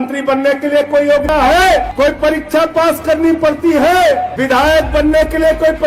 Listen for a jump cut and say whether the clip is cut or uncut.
cut